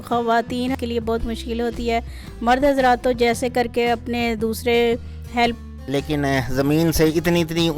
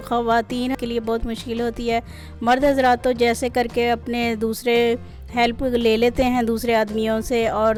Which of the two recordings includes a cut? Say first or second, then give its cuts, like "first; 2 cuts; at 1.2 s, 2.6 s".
first; 1 cut; at 5.6 s